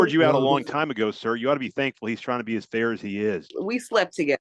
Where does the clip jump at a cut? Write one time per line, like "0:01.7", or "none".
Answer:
0:03.5